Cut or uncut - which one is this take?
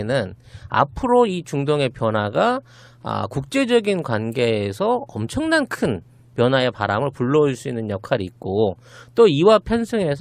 uncut